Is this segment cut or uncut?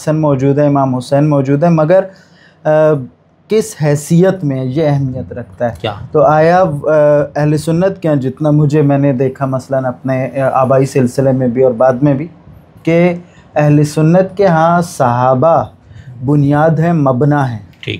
uncut